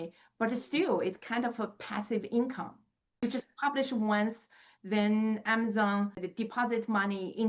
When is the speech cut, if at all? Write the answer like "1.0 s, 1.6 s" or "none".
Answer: 3.2 s, 6.2 s

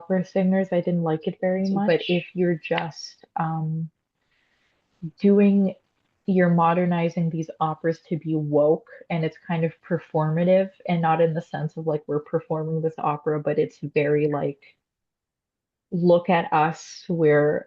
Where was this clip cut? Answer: 1.9 s

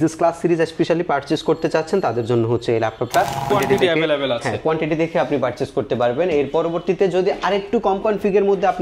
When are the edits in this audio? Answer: 3.5 s

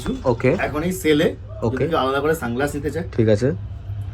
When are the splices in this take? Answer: none

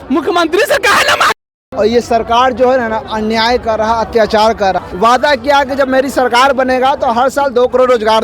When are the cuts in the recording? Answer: 1.6 s, 4.8 s

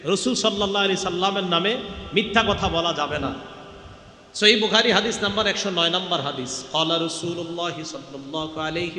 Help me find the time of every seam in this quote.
none

